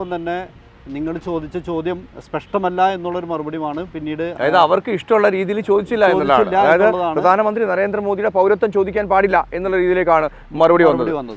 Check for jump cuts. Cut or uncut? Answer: uncut